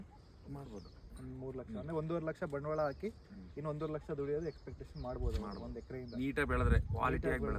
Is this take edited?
no; 0 cuts

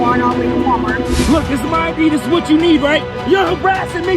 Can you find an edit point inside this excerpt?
yes; 2 cuts; at 1.2 s, 3.1 s

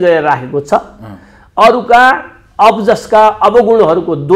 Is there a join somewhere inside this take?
no; 0 cuts

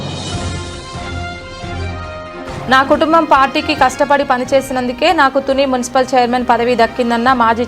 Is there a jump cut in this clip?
no; 0 cuts

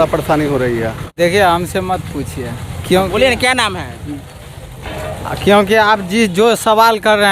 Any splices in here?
yes; 1 cut; at 1.0 s

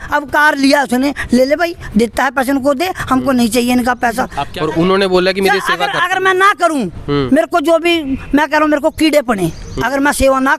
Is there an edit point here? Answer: yes; 1 cut; at 4.5 s

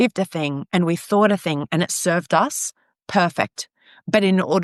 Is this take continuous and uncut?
yes; 0 cuts

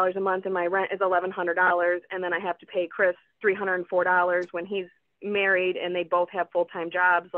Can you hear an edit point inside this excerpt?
no; 0 cuts

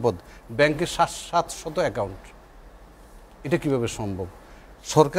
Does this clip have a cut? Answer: no; 0 cuts

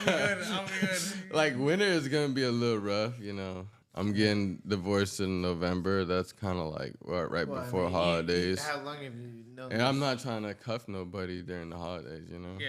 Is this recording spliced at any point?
no; 0 cuts

